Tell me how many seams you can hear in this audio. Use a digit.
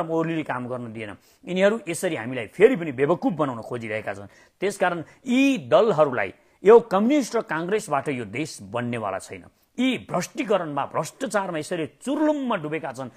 0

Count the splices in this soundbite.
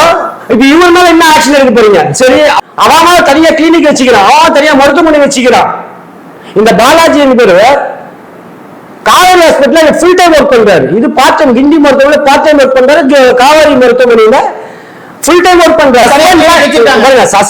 2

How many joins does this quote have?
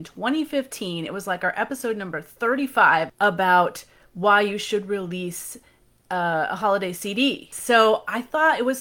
2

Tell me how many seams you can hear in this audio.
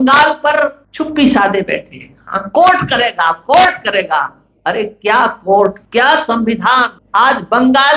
3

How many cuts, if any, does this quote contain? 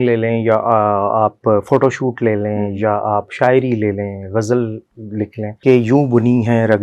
1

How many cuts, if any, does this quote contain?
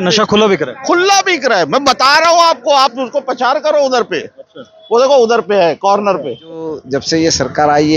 1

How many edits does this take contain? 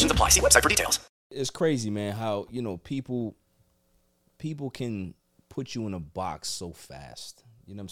1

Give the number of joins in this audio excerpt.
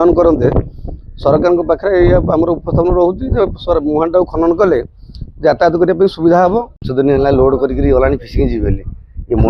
1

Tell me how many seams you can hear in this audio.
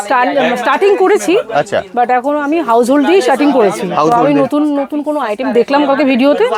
0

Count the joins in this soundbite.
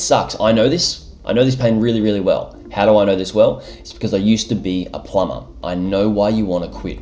1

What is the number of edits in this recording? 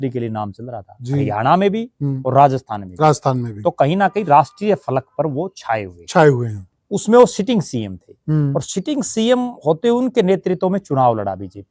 1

